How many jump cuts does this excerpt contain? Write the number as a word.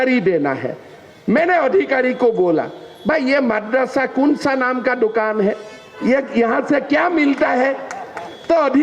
zero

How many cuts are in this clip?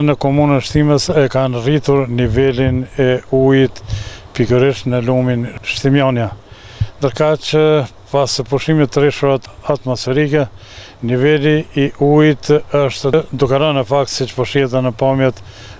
three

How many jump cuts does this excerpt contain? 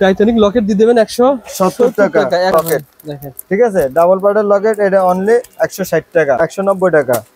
two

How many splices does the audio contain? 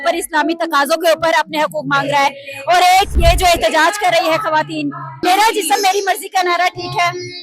two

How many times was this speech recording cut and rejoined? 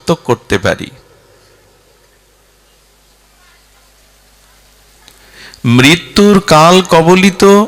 zero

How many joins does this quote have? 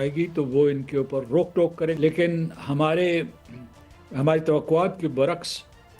one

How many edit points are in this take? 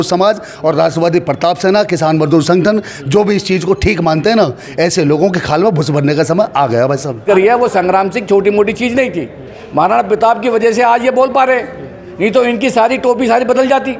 one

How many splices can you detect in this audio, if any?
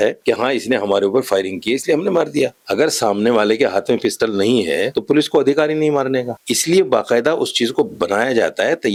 zero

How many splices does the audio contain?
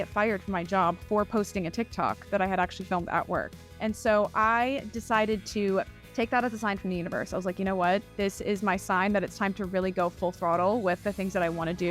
two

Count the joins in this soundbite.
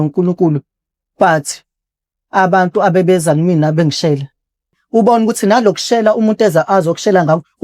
one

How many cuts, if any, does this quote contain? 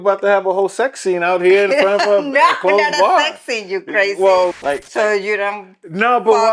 one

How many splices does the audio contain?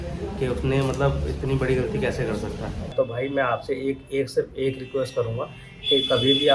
one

